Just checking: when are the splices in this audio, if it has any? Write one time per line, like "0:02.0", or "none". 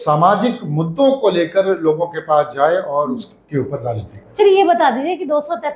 none